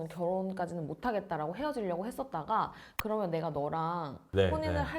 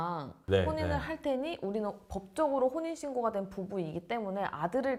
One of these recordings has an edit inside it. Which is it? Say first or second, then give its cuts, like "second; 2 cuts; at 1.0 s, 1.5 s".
first; 1 cut; at 2.9 s